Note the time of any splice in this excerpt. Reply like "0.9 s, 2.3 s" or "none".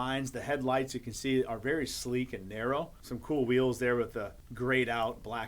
3.0 s, 4.4 s